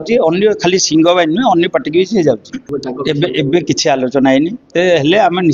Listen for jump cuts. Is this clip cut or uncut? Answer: cut